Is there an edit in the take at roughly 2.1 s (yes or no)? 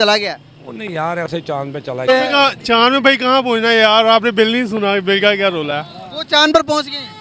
yes